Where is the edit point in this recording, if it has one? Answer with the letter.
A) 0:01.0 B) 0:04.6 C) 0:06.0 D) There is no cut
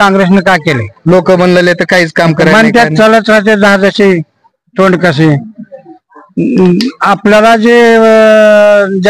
D